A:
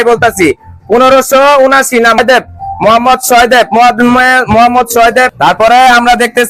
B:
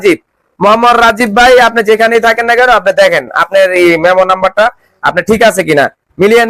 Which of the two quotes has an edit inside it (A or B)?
A